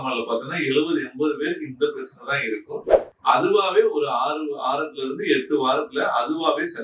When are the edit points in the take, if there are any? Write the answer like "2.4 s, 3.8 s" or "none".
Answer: 3.0 s